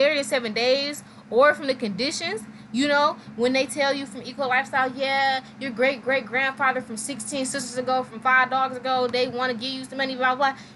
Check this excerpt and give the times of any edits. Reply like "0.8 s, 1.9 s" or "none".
none